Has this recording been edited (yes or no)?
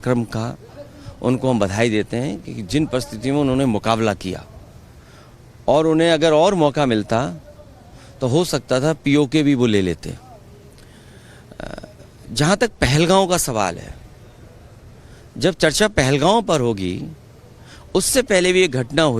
no